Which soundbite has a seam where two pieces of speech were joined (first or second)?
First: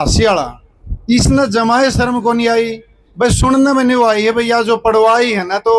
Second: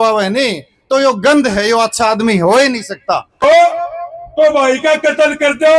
second